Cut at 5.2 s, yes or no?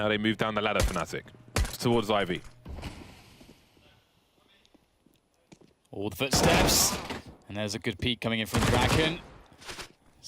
no